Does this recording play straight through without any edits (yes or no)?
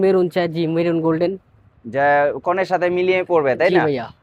yes